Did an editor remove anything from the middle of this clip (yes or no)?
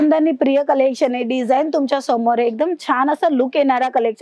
no